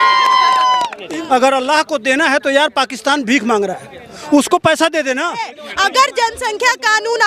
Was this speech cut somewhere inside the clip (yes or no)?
yes